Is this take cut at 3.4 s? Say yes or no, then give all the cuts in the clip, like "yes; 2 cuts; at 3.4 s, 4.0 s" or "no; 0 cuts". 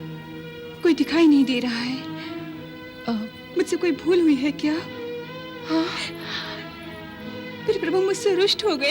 yes; 1 cut; at 3.4 s